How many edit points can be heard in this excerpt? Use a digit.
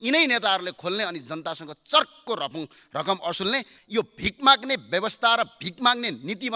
1